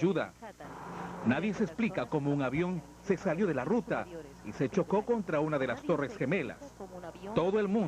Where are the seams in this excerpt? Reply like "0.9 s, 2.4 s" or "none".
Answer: 4.7 s